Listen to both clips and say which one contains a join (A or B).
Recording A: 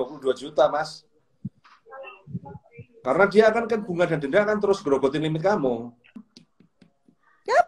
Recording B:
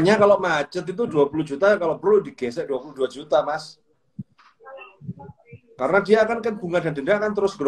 A